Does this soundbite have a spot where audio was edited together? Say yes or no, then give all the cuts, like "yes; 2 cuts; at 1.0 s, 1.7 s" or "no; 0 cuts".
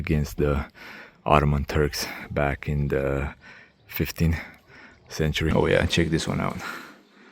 yes; 1 cut; at 5.5 s